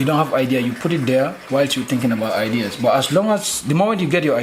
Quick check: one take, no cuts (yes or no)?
yes